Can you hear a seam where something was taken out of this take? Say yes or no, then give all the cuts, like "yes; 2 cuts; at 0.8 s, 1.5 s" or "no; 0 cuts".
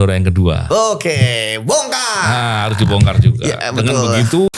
no; 0 cuts